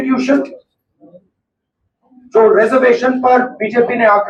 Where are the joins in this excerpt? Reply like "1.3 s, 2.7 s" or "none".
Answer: none